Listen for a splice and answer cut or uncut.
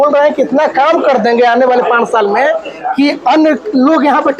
uncut